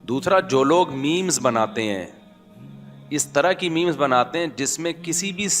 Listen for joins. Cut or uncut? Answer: uncut